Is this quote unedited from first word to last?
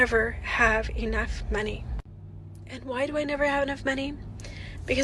yes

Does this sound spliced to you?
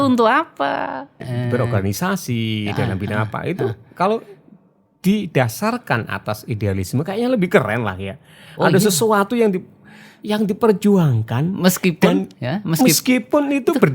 yes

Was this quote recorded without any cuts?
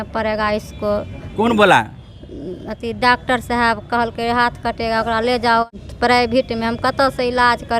no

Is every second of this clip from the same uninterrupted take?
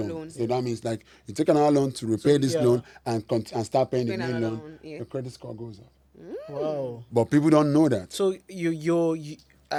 yes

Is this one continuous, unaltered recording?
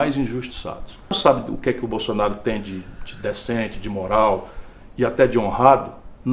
no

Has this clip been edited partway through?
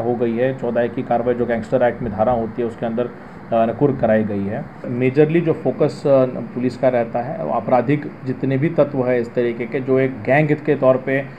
yes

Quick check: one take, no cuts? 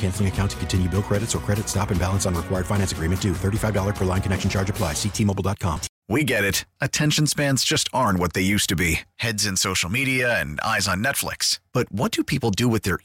no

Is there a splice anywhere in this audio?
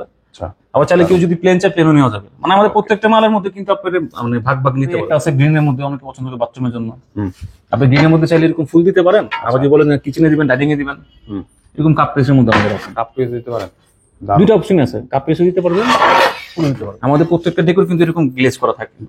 yes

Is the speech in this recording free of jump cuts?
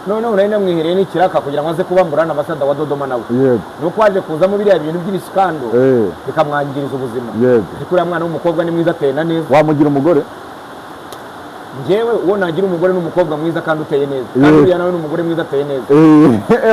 yes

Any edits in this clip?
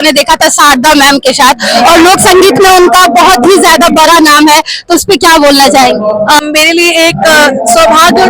yes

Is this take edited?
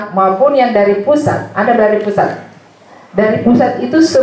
no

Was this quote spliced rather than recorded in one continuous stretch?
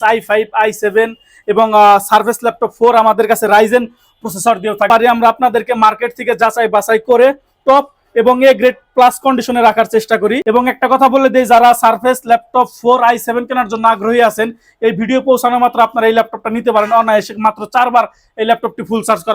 yes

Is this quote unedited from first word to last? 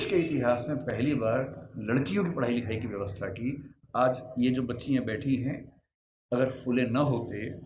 yes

